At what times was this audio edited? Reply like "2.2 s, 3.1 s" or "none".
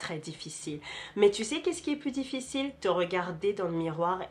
none